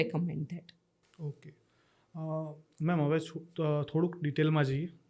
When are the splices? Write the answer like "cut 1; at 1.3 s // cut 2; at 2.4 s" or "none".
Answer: none